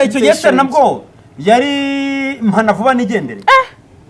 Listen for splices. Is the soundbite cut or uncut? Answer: uncut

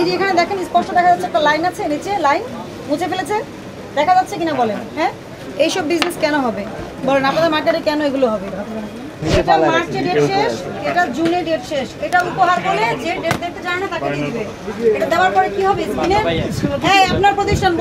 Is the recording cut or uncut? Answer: cut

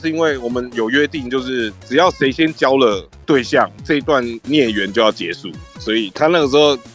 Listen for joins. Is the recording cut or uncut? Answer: uncut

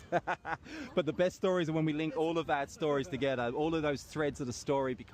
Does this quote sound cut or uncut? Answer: cut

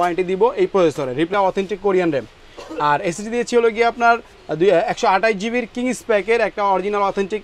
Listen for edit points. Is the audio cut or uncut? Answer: cut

